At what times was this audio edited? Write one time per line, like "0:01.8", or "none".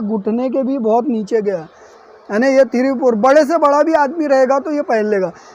none